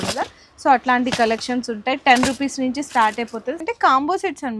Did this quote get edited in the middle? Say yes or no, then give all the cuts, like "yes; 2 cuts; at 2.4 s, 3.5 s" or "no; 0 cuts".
yes; 1 cut; at 3.6 s